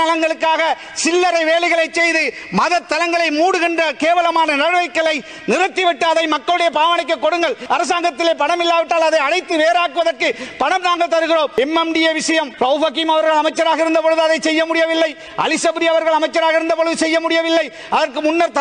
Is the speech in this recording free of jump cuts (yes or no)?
no